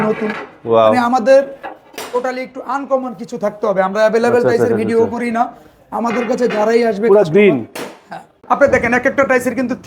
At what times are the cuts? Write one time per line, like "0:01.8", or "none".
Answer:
0:08.3